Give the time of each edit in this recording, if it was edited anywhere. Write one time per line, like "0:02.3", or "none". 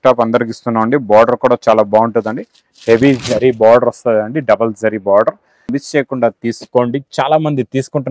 0:05.8